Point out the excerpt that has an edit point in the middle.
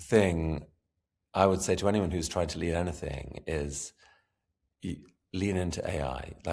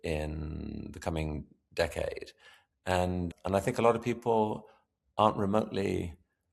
second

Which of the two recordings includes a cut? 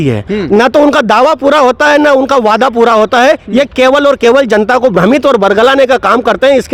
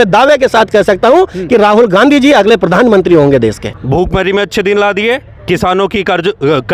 second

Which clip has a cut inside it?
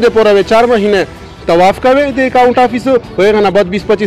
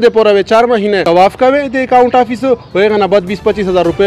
second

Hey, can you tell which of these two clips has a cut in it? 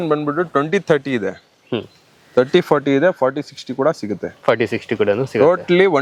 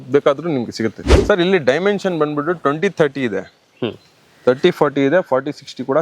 second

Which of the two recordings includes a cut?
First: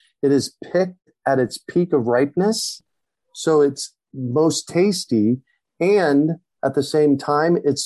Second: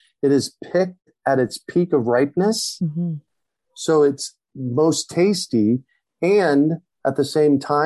first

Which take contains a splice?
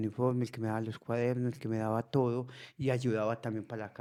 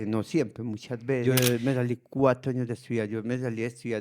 second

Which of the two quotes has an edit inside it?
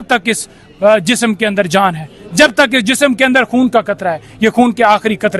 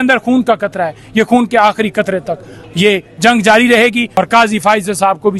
second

